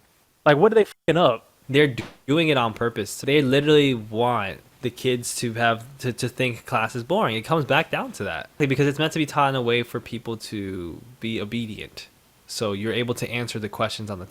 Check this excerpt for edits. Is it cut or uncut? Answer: cut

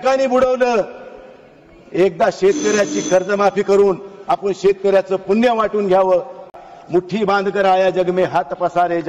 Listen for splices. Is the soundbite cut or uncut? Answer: cut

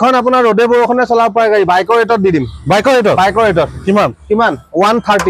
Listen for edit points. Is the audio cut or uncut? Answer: uncut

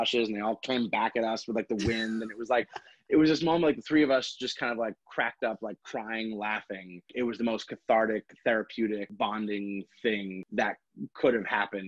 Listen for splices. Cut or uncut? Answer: cut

